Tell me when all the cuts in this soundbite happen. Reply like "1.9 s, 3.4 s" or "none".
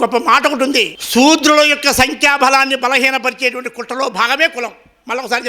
1.0 s